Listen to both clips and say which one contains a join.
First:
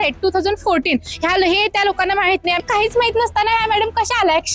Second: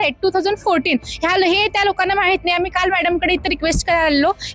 first; 1 cut; at 2.6 s

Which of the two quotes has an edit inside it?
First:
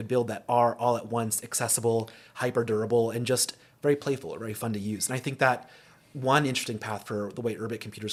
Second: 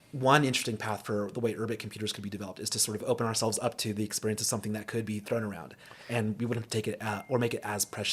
second; 1 cut; at 3.0 s

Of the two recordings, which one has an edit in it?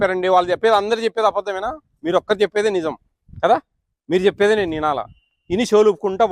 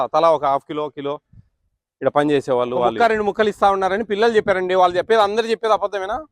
second; 1 cut; at 2.9 s

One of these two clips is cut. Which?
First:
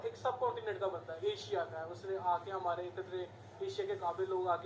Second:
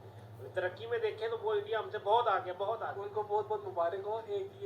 second; 1 cut; at 3.0 s

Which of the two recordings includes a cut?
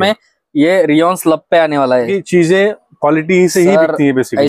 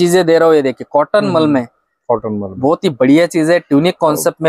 first; 1 cut; at 2.1 s

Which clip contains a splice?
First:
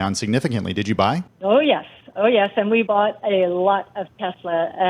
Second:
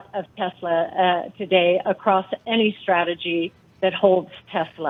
first; 2 cuts; at 1.3 s, 2.9 s

